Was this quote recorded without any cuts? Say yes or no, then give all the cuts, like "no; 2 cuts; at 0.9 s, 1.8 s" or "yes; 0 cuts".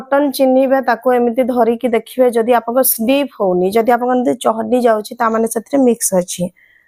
yes; 0 cuts